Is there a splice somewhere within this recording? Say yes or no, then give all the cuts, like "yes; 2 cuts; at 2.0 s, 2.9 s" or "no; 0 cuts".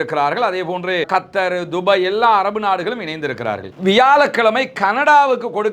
yes; 1 cut; at 3.8 s